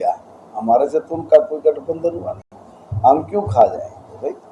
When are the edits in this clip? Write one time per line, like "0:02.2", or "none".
none